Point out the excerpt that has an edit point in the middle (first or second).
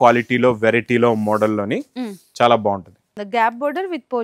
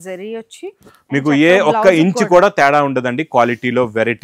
first